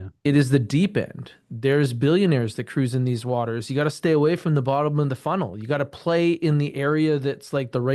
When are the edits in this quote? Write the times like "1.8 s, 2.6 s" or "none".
none